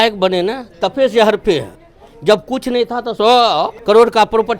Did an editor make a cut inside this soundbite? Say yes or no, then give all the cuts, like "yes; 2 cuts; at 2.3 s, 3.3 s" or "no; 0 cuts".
yes; 2 cuts; at 3.1 s, 3.8 s